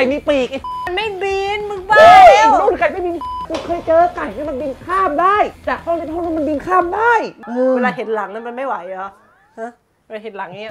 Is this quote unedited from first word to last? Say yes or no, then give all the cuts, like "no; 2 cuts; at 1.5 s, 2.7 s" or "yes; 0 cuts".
no; 1 cut; at 7.4 s